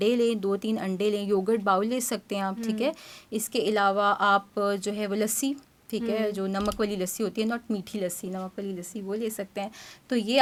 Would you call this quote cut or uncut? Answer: uncut